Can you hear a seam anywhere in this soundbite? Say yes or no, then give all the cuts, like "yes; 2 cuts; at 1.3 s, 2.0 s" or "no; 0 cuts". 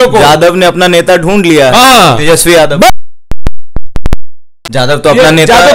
yes; 1 cut; at 4.5 s